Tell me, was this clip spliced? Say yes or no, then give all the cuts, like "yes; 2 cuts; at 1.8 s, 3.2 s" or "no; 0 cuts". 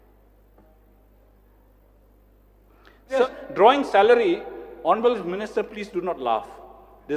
yes; 1 cut; at 3.2 s